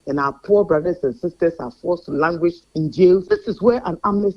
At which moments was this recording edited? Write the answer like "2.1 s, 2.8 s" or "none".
3.2 s